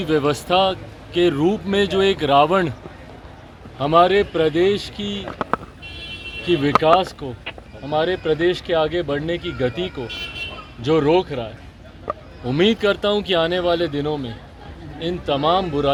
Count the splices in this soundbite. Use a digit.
0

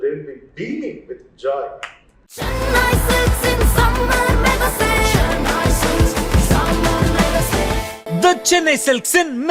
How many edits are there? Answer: 1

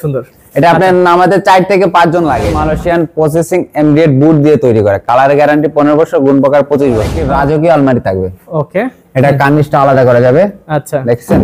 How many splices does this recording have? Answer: 2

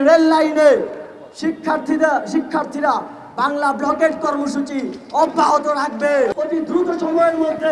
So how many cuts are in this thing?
1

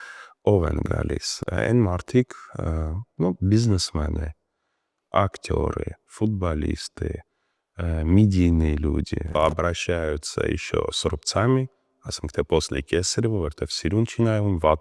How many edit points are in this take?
1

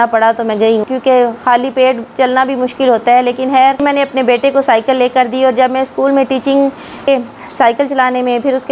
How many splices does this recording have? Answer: 3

